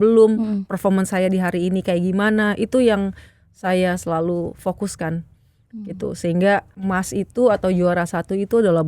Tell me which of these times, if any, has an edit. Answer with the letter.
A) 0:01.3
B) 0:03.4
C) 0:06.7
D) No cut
C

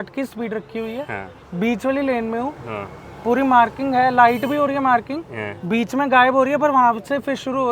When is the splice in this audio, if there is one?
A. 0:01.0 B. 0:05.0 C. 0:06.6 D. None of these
D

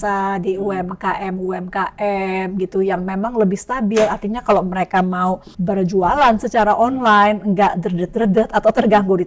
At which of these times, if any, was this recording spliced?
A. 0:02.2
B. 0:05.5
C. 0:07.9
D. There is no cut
B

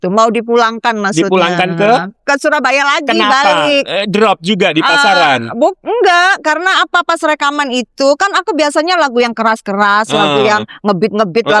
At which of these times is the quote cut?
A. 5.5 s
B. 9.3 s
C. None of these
C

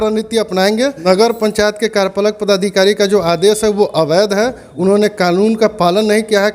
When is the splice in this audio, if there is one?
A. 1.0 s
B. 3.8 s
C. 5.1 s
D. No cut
A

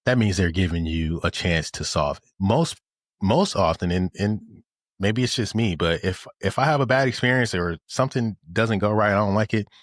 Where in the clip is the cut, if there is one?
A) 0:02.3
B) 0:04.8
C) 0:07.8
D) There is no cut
A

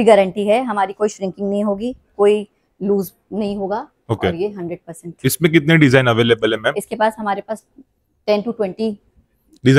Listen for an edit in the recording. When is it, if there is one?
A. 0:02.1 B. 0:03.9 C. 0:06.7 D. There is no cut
D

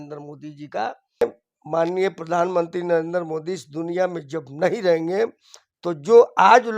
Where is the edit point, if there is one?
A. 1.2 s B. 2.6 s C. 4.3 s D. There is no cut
A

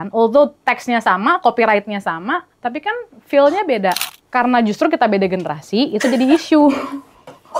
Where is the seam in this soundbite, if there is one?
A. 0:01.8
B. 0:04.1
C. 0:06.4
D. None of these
B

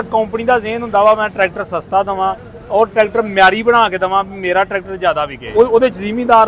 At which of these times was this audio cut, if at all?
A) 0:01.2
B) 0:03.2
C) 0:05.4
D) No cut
C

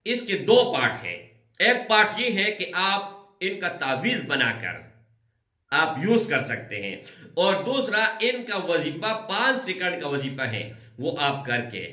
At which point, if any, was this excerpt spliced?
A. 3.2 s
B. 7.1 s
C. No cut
C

